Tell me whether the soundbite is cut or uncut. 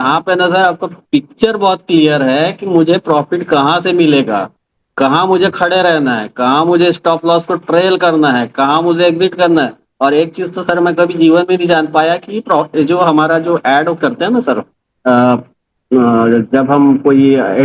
uncut